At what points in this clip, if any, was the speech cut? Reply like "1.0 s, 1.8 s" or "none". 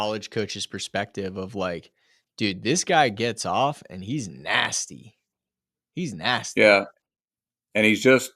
none